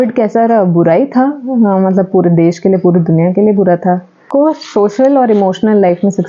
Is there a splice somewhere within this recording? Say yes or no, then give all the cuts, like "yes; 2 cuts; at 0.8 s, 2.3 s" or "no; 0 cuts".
yes; 1 cut; at 4.2 s